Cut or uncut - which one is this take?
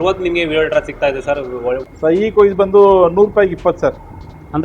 cut